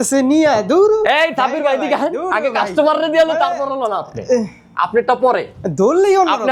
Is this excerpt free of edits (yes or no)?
yes